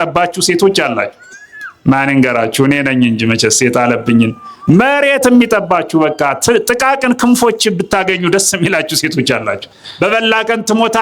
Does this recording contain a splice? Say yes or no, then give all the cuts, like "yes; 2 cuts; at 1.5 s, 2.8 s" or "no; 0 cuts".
yes; 1 cut; at 9.8 s